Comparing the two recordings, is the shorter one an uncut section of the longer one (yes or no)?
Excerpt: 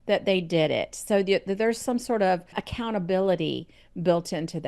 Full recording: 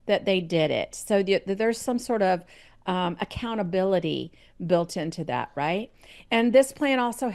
no